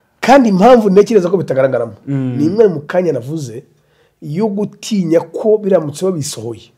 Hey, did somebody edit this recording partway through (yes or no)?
no